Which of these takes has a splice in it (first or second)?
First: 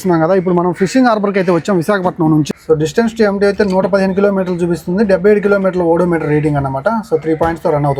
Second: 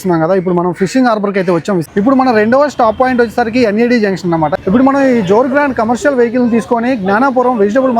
second